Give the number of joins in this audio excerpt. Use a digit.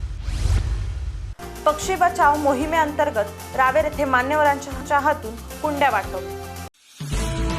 2